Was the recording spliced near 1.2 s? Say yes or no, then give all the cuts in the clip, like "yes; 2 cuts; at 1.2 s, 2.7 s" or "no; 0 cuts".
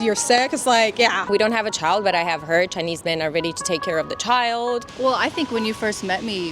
yes; 2 cuts; at 1.2 s, 4.9 s